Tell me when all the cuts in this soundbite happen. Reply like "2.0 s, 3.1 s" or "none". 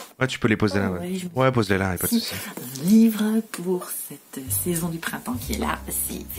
none